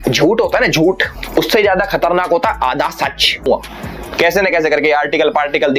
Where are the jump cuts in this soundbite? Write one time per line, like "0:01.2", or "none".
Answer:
0:03.5